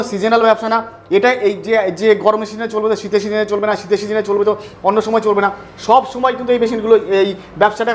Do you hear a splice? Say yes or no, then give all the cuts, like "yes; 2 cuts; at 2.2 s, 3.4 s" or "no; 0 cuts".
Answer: no; 0 cuts